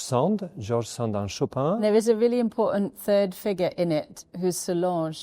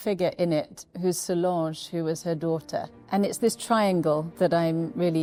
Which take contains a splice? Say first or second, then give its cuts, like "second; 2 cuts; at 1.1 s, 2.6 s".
first; 1 cut; at 1.8 s